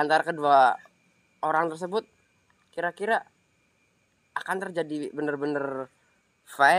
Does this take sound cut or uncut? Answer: uncut